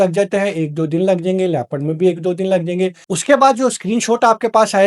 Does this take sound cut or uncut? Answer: cut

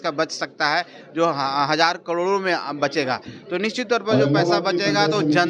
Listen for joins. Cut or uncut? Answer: uncut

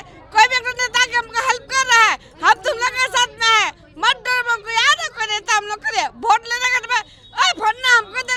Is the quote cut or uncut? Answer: uncut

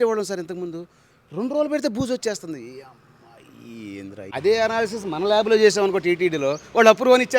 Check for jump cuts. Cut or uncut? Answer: cut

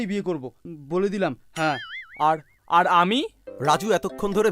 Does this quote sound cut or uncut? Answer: cut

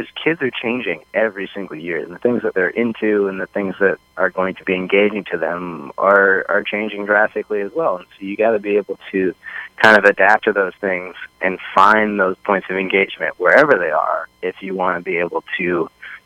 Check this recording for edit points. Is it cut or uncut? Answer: uncut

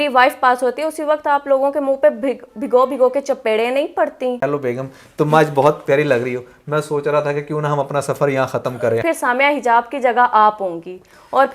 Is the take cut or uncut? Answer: cut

